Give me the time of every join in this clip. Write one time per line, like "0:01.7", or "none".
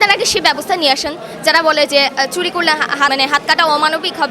0:03.1